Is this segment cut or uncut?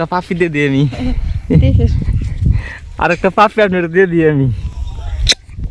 cut